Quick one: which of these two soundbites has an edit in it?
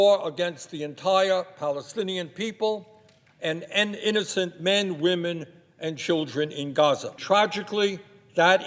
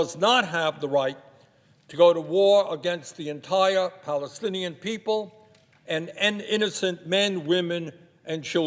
first; 1 cut; at 7.1 s

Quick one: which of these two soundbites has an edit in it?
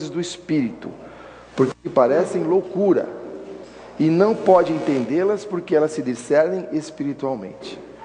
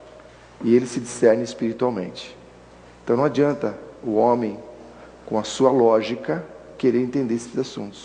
first; 1 cut; at 6.0 s

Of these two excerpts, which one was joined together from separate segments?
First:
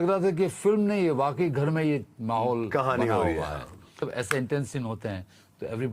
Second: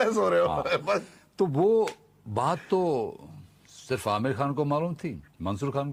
first; 1 cut; at 4.1 s

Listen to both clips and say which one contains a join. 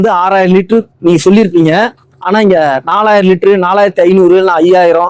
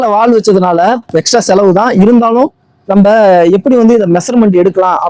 second; 1 cut; at 1.0 s

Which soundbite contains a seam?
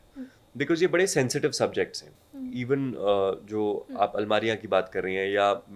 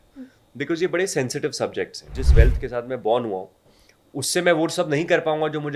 second; 1 cut; at 2.2 s

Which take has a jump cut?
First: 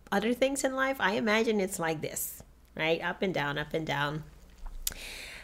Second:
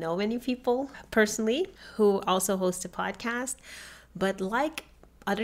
second; 1 cut; at 1.8 s

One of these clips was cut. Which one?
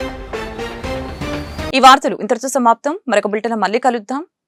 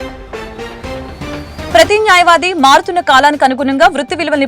second; 1 cut; at 1.7 s

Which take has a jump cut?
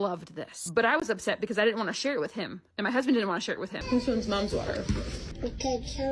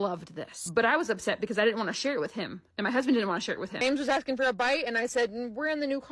first; 2 cuts; at 3.7 s, 5.0 s

